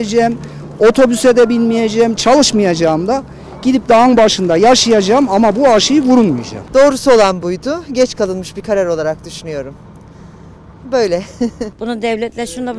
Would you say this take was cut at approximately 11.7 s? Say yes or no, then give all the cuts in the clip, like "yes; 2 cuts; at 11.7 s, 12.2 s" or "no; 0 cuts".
yes; 2 cuts; at 6.5 s, 11.7 s